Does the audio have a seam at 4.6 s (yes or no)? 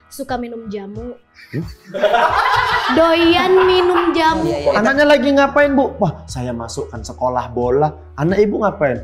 yes